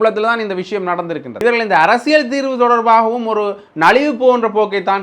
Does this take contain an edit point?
yes; 1 cut; at 1.3 s

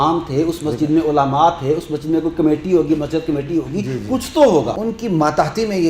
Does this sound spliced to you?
yes; 1 cut; at 4.7 s

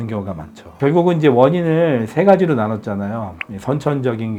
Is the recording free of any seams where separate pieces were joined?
yes; 0 cuts

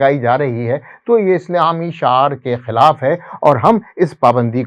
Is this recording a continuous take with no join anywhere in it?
yes; 0 cuts

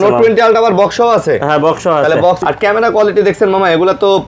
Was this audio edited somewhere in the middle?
yes; 1 cut; at 2.4 s

